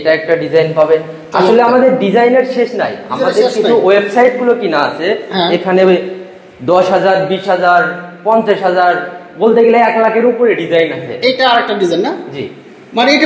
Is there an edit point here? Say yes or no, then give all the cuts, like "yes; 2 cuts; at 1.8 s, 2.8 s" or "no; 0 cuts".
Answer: no; 0 cuts